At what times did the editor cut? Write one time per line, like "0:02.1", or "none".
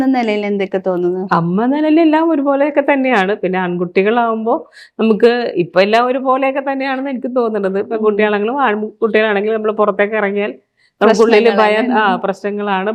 none